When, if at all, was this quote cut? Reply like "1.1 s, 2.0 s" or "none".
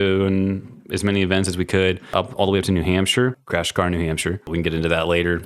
2.1 s, 3.4 s, 4.5 s